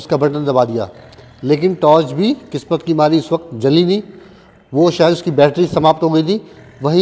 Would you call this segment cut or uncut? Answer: uncut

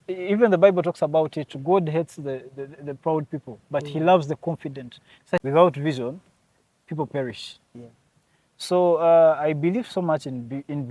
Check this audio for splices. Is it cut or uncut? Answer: cut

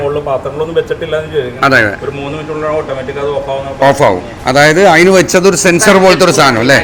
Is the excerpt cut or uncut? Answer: uncut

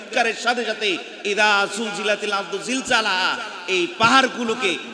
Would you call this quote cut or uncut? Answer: uncut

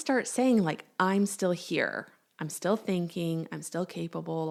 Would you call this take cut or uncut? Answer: uncut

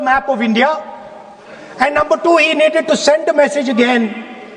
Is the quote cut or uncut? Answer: uncut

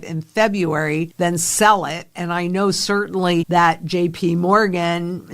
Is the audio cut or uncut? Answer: cut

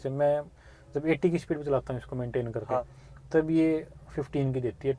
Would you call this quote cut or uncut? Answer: uncut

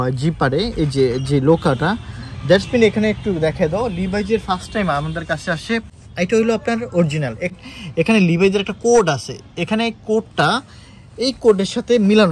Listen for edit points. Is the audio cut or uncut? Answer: cut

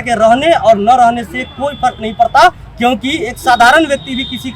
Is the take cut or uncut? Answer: uncut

